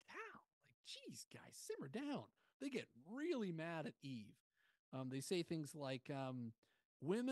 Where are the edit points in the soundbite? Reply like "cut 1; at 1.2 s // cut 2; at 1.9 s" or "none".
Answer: none